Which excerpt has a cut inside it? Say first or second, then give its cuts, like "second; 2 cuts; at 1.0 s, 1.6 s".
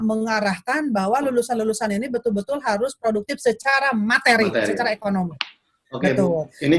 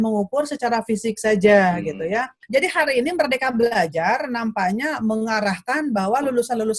second; 1 cut; at 2.4 s